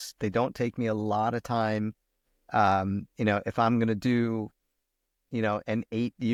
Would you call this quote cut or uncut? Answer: uncut